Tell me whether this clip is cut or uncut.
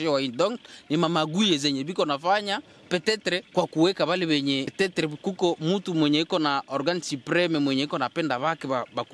cut